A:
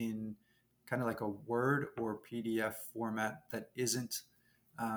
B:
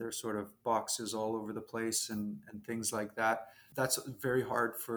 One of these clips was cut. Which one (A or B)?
B